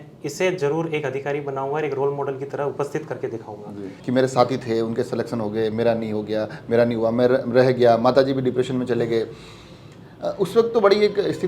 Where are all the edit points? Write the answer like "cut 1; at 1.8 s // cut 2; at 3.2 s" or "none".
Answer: cut 1; at 3.9 s